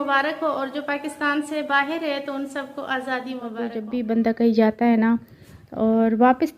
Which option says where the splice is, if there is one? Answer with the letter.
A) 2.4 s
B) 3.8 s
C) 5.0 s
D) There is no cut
B